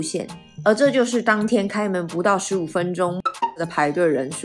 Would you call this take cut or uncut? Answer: cut